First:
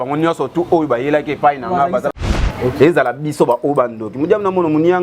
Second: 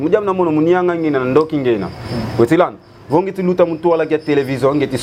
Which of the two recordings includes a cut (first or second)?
first